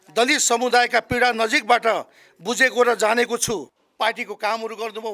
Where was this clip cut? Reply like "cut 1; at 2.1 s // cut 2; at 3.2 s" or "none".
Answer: cut 1; at 3.8 s